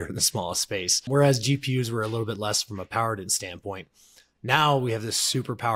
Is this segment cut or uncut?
cut